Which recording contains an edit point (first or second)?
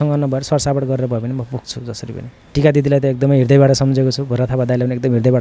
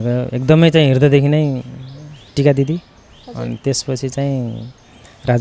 first